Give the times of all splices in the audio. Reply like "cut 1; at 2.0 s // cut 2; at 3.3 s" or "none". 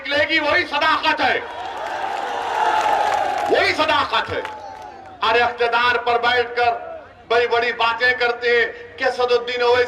none